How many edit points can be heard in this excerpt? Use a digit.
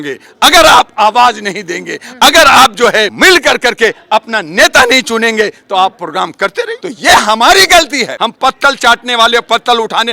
3